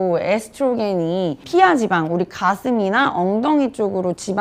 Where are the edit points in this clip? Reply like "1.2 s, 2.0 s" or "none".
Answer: 1.4 s